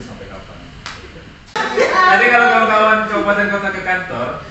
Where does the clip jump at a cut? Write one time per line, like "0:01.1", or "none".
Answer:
0:01.6